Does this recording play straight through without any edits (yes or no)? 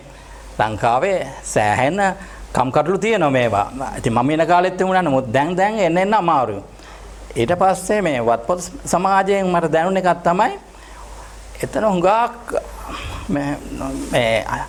yes